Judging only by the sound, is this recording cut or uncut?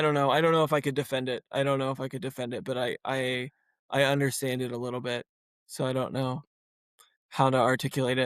uncut